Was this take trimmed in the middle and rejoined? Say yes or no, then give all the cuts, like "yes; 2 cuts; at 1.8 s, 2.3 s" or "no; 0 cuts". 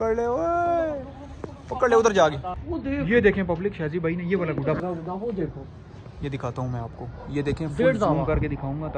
yes; 2 cuts; at 2.6 s, 4.8 s